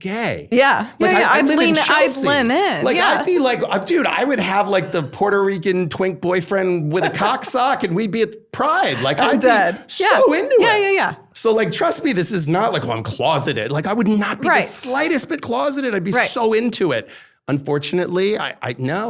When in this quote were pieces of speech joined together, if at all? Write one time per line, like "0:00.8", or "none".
none